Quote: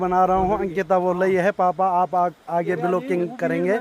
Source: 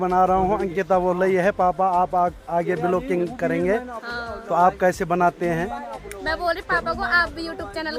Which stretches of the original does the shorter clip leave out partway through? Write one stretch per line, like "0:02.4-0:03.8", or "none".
none